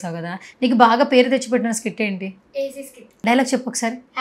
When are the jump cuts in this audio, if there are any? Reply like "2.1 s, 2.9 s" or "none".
3.0 s